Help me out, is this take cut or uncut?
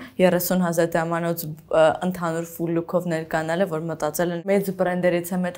cut